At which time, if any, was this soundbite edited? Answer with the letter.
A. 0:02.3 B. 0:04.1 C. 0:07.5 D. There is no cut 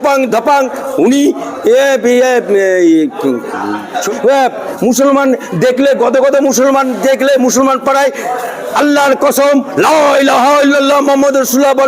B